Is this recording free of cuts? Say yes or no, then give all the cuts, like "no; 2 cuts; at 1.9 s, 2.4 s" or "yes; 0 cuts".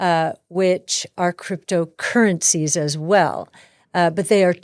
yes; 0 cuts